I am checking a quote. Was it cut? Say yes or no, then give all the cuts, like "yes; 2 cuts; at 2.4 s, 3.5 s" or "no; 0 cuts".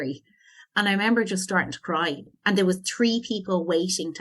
yes; 1 cut; at 2.2 s